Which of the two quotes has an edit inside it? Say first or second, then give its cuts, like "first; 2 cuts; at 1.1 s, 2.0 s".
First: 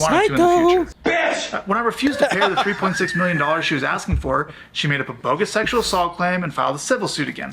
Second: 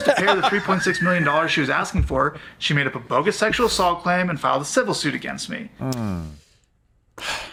first; 1 cut; at 0.9 s